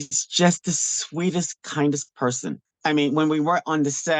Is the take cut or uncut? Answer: cut